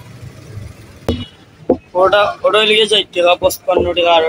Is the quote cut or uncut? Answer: cut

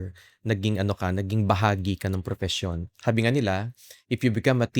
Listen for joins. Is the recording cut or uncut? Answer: cut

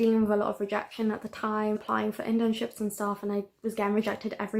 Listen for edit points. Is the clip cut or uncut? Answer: uncut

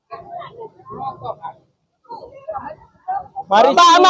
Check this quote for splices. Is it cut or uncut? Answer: uncut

